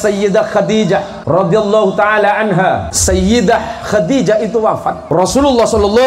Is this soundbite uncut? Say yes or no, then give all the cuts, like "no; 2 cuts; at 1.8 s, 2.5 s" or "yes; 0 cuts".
no; 3 cuts; at 1.1 s, 2.9 s, 5.0 s